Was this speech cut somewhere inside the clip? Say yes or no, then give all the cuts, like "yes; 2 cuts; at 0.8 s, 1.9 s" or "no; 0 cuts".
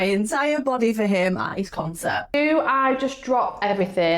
yes; 1 cut; at 2.3 s